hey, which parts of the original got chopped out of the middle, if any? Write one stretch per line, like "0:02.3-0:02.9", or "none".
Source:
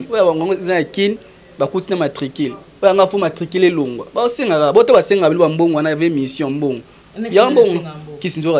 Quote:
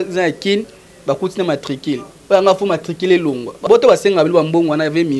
0:04.2-0:04.7